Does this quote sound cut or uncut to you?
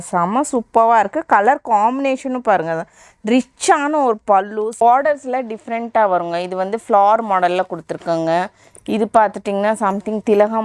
cut